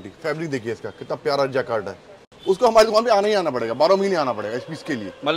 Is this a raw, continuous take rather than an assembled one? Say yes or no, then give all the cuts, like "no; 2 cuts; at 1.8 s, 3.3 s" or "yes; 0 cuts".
yes; 0 cuts